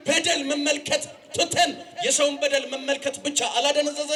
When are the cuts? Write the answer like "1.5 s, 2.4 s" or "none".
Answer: none